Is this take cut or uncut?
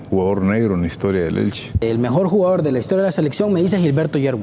cut